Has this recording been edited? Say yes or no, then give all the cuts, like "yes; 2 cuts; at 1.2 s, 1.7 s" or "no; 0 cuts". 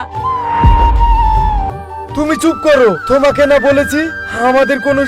yes; 1 cut; at 1.7 s